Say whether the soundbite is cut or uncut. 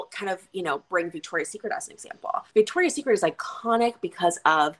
cut